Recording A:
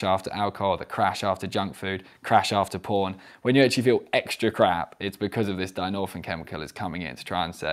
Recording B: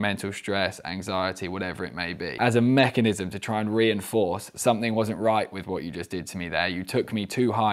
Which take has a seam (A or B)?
B